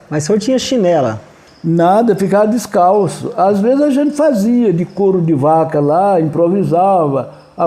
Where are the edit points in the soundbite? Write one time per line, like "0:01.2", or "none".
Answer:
none